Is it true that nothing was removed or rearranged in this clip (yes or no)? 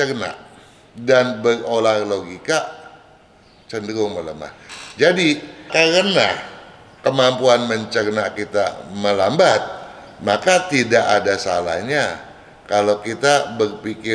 yes